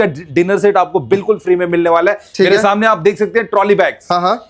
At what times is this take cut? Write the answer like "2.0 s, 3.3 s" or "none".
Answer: none